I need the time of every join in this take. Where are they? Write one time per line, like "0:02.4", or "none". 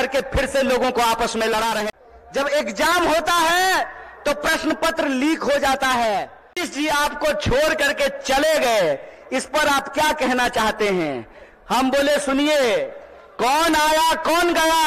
0:01.8
0:06.7